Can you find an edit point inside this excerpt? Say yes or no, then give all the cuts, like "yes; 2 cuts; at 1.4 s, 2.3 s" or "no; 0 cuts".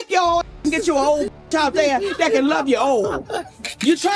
no; 0 cuts